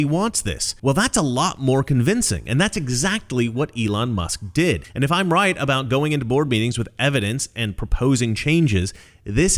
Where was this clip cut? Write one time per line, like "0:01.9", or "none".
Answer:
0:04.8